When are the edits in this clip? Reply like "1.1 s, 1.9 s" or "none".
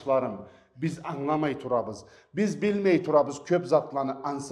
none